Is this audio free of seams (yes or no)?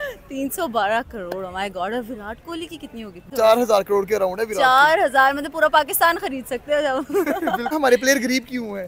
no